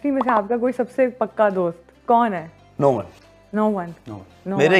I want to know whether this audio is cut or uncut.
uncut